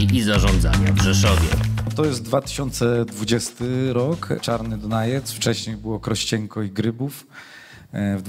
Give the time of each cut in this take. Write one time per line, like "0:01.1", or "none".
0:01.9